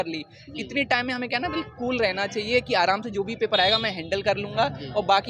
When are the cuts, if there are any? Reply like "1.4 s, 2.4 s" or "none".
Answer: none